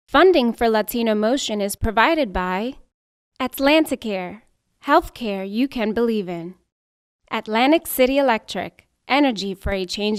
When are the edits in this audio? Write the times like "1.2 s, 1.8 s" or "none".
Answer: none